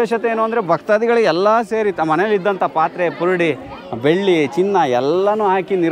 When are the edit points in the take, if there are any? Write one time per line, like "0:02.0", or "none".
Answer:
none